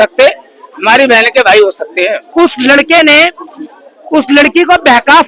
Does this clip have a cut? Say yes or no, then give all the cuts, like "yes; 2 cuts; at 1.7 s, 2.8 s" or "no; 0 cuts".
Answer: yes; 1 cut; at 2.2 s